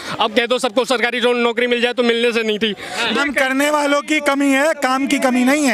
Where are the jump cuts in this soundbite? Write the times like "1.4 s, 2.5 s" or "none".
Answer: 3.1 s